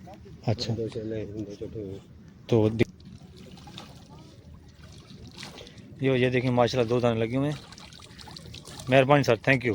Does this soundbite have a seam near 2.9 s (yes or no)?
yes